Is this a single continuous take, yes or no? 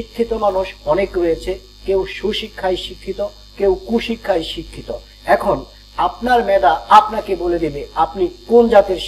yes